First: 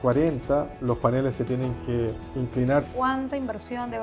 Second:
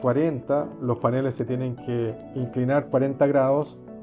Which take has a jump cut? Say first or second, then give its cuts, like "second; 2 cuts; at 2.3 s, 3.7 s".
first; 1 cut; at 2.9 s